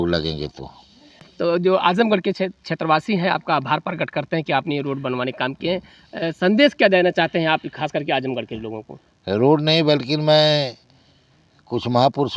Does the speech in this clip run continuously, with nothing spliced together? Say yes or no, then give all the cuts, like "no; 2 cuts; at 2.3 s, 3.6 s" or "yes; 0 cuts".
yes; 0 cuts